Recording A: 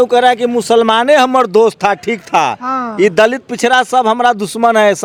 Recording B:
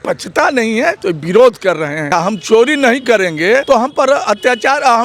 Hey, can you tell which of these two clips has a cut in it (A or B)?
B